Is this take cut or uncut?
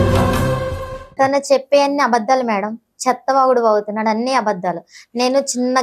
cut